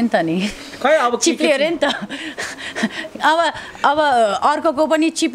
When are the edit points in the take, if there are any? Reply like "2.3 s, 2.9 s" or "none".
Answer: none